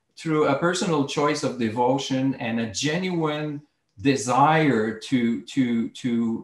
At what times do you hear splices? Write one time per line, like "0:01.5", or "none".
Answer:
none